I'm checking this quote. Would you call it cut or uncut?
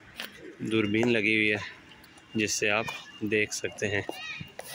uncut